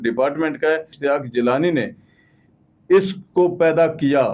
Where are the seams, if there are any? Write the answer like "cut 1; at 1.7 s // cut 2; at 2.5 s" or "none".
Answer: cut 1; at 0.9 s